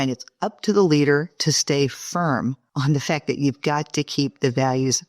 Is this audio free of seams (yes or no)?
no